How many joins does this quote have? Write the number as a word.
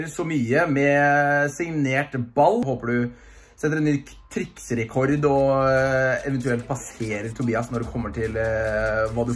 one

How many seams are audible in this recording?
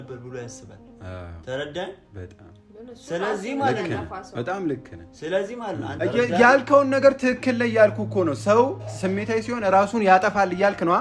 one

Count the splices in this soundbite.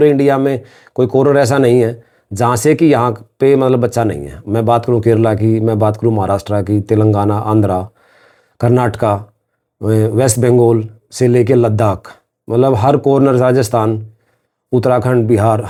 zero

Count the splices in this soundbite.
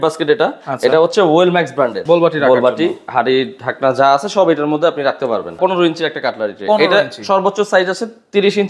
two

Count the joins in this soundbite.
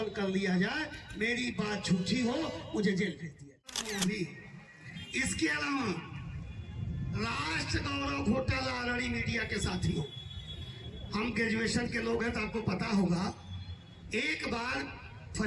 one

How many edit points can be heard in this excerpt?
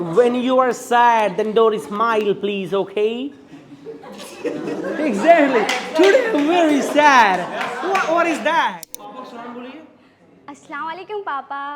one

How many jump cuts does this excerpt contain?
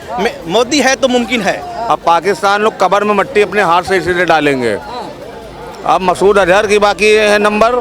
one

